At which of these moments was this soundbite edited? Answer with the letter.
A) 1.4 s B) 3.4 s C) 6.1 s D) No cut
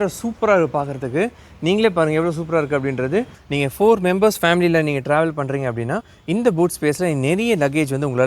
B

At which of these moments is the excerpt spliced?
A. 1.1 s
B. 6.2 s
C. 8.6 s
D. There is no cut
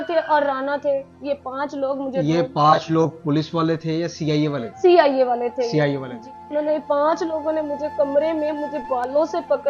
B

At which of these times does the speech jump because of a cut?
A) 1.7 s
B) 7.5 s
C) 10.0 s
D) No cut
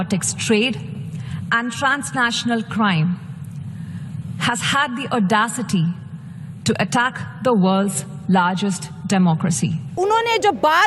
C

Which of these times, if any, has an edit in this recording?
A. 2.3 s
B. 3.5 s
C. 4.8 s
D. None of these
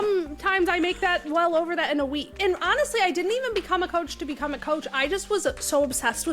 A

